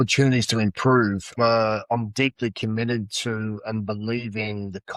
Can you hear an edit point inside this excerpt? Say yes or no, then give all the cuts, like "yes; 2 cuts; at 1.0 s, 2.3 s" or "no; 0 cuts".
no; 0 cuts